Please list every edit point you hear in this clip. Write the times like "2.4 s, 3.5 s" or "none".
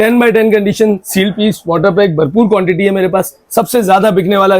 3.4 s